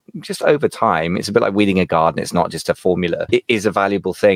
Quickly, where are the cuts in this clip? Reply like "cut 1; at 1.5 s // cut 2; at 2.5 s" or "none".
cut 1; at 3.3 s